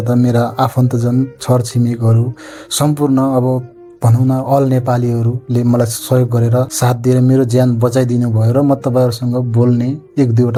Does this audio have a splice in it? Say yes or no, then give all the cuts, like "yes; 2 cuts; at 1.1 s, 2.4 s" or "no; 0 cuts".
no; 0 cuts